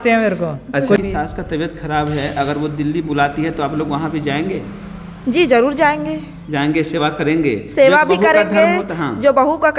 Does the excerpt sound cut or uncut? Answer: cut